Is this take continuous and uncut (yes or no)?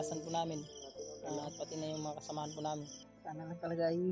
no